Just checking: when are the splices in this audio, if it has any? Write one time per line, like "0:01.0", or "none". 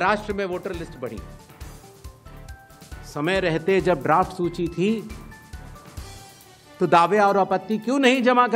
none